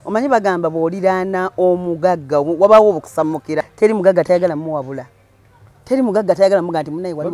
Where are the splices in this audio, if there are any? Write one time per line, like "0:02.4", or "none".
0:03.5